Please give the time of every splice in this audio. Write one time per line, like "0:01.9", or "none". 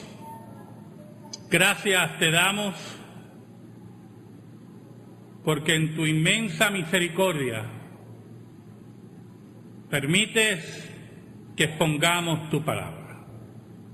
0:09.3